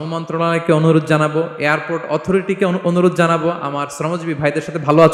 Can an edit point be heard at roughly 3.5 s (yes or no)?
no